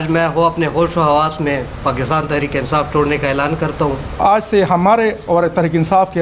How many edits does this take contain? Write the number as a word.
one